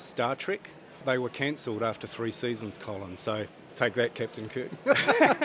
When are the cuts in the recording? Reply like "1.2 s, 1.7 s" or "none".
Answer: 1.0 s, 3.6 s